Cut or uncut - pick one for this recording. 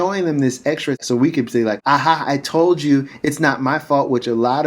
cut